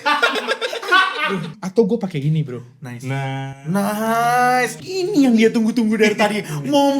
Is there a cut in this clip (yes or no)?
yes